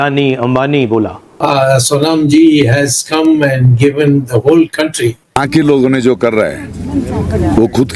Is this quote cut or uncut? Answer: cut